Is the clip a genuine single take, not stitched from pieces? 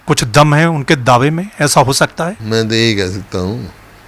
no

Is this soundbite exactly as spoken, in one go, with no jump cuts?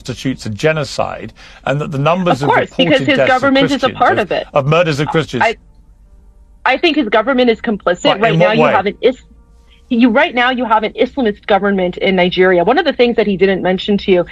yes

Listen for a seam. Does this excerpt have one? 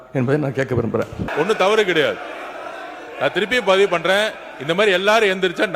yes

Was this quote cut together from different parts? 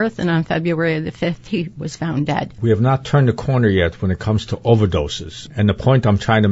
yes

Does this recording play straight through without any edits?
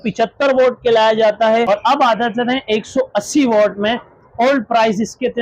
no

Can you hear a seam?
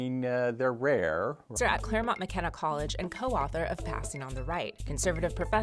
no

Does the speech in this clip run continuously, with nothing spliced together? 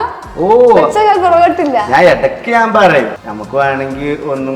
no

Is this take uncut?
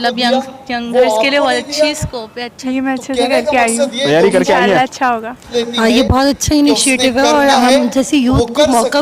no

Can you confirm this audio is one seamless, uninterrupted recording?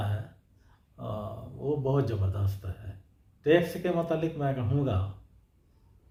yes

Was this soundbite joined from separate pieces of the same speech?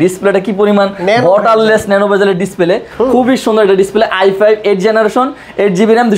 no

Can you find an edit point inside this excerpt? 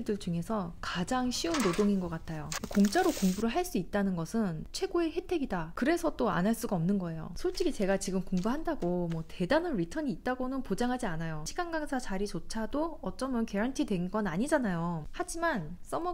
yes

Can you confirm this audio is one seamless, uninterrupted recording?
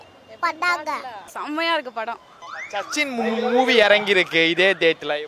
no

